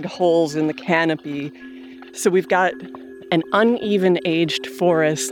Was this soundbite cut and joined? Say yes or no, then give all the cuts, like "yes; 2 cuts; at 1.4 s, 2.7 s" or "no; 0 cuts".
yes; 2 cuts; at 2.1 s, 3.2 s